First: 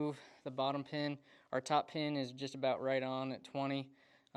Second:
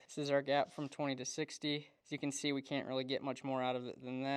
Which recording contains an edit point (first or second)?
second